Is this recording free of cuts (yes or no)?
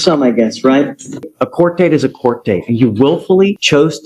no